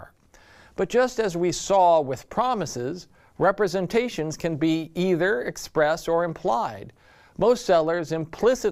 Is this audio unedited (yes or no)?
no